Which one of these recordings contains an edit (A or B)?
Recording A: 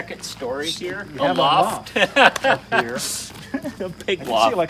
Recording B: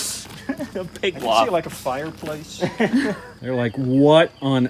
B